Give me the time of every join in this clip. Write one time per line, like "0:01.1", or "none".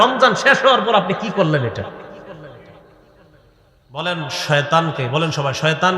0:04.0